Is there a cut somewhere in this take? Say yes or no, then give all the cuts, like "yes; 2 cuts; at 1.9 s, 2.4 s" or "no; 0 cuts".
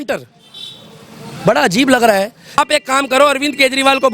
yes; 1 cut; at 2.6 s